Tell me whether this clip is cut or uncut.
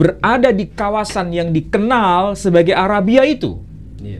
uncut